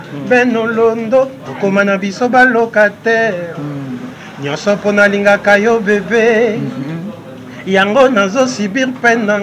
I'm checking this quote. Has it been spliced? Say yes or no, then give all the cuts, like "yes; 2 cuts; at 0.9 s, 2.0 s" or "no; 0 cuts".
no; 0 cuts